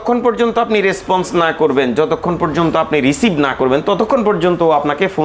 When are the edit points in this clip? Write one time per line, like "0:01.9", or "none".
none